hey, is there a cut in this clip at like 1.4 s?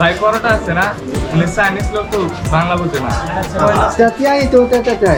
no; 0 cuts

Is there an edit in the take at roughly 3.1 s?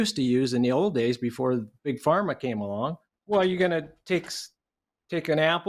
yes; 1 cut; at 3.1 s

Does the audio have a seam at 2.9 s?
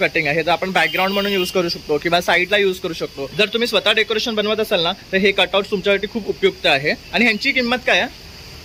no; 0 cuts

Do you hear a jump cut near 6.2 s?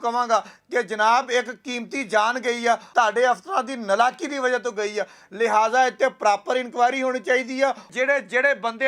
no; 2 cuts; at 2.9 s, 7.9 s

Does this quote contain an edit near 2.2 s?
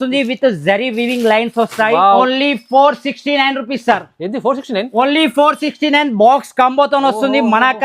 yes; 1 cut; at 2.2 s

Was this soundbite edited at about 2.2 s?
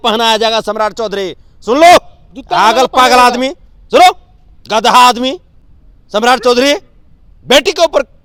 no; 0 cuts

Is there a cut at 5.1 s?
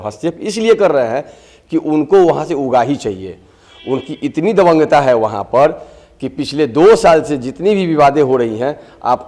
no; 0 cuts

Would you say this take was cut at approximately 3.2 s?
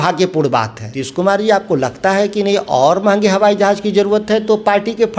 no; 1 cut; at 1.0 s

